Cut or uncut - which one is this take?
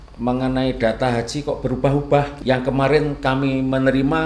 cut